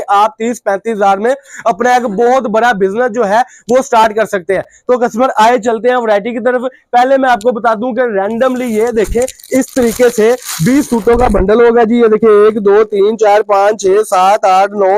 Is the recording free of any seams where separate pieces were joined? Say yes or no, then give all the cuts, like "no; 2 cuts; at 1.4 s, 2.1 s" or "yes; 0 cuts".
yes; 0 cuts